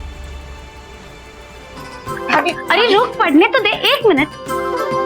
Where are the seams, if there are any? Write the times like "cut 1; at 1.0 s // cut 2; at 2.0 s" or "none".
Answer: cut 1; at 1.9 s